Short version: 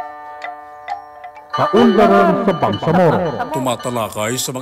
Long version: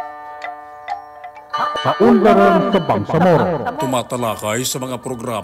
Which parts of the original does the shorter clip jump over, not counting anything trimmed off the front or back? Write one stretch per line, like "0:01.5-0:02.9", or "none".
0:01.6-0:01.8